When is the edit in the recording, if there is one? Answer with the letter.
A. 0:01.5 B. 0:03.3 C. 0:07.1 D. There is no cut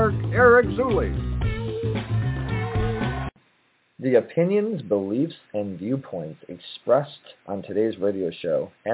B